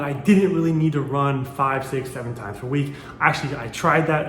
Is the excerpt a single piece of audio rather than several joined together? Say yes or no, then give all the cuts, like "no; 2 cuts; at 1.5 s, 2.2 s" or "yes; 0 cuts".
yes; 0 cuts